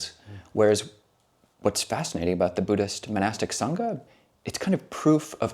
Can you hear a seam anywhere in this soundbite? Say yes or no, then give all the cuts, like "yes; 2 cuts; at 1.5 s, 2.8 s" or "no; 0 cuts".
yes; 1 cut; at 4.0 s